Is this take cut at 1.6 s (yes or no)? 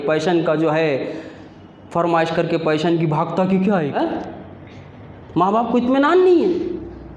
no